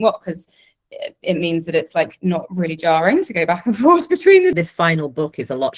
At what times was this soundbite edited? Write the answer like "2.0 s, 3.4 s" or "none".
4.6 s